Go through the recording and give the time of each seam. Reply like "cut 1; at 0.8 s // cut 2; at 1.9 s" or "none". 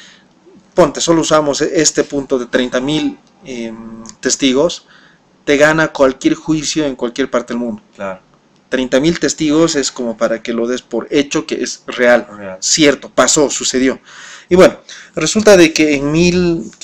none